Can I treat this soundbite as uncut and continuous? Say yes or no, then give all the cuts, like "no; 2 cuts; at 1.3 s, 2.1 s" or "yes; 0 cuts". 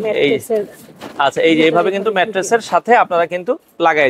yes; 0 cuts